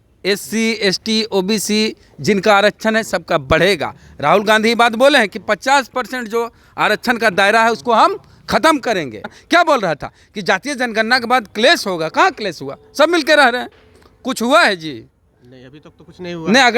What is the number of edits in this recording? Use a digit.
1